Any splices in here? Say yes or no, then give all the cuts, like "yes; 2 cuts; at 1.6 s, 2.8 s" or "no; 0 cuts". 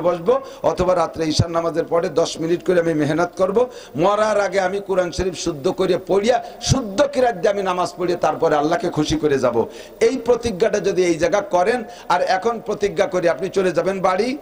no; 0 cuts